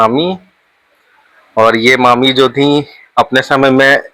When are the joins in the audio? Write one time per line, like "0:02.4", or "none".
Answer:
none